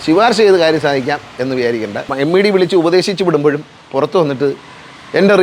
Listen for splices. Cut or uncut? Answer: cut